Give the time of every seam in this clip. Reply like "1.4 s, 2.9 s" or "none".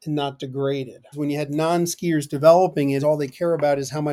1.1 s, 3.0 s